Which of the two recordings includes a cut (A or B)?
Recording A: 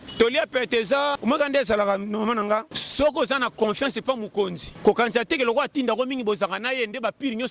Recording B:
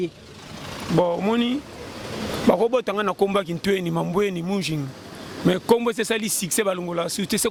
A